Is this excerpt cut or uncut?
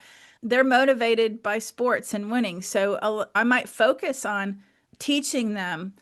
cut